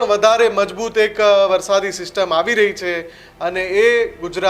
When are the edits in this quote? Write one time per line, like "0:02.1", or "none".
none